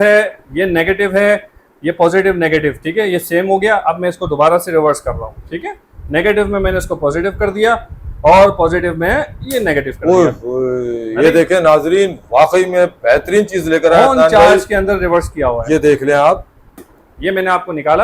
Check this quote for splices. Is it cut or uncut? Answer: cut